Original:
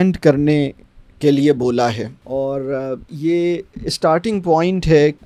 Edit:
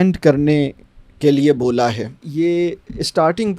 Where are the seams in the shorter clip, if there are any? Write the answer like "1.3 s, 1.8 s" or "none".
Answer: 2.2 s